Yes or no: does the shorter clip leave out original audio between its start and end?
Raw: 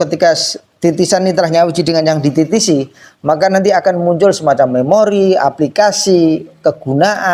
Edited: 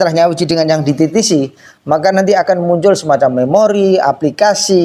no